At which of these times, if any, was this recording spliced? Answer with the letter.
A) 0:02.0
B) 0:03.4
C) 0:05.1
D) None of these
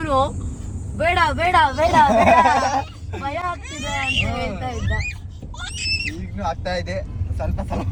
D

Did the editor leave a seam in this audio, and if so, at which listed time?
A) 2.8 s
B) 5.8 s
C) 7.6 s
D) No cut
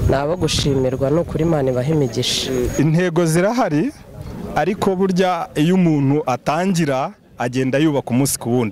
A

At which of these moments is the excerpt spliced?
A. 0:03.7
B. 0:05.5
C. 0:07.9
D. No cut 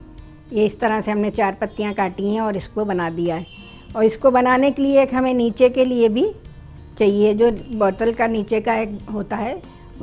D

